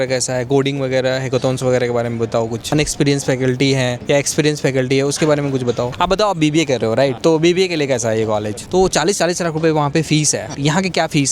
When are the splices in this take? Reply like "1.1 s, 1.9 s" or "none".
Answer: 2.7 s, 5.9 s, 7.2 s, 8.6 s